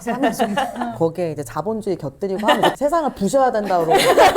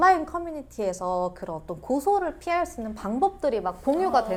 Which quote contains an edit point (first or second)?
first